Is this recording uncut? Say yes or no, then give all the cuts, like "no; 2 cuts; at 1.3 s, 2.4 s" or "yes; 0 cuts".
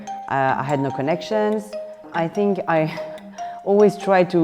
no; 1 cut; at 1.7 s